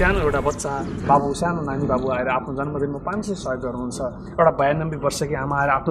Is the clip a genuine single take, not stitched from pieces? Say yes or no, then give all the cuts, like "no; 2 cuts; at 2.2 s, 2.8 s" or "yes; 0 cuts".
yes; 0 cuts